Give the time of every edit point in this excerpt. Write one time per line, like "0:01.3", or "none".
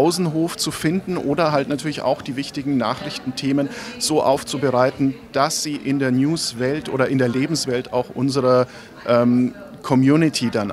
none